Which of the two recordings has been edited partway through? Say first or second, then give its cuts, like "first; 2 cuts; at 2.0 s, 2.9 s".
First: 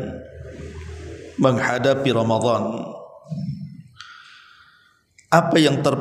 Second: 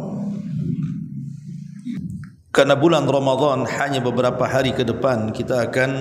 second; 1 cut; at 2.0 s